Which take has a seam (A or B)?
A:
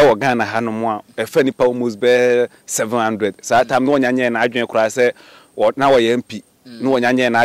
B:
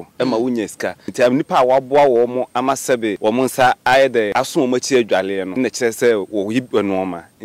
B